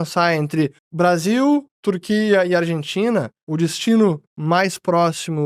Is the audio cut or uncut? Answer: uncut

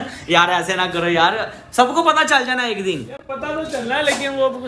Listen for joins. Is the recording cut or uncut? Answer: uncut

